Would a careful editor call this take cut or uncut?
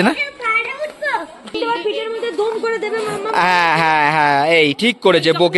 cut